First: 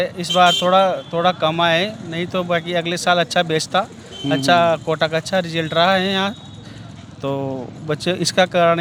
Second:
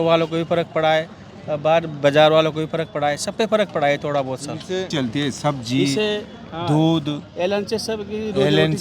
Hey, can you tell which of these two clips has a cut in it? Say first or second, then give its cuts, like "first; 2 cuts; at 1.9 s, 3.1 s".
second; 1 cut; at 4.9 s